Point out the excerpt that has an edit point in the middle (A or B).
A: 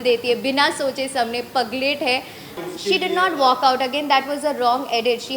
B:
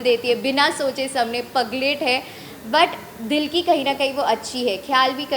A